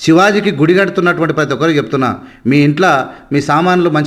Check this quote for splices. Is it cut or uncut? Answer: uncut